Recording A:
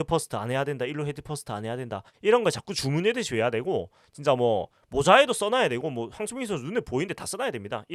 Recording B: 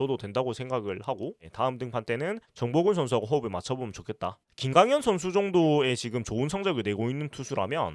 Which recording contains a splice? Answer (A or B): B